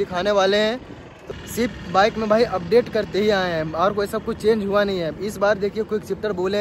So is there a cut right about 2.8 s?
no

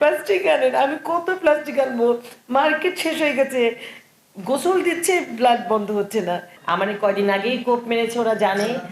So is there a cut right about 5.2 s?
no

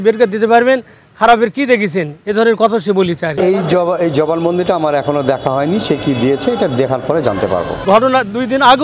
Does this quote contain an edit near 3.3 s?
yes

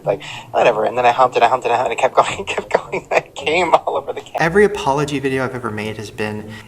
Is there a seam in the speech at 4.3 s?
yes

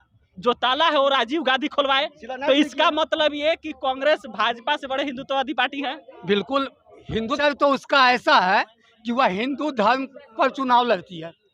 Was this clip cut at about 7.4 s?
yes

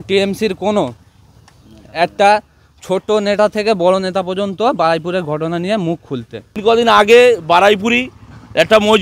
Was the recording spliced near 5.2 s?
no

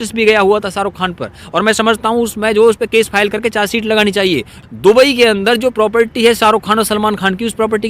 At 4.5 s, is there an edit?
yes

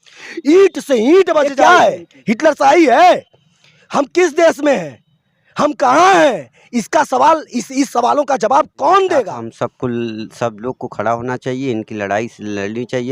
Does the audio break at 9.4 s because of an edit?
yes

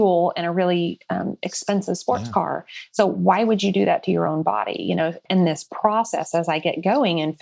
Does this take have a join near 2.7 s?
no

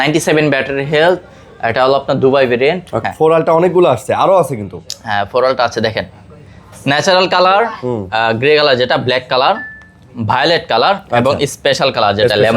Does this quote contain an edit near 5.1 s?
no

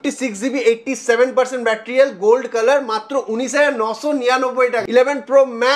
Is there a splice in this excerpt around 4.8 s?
yes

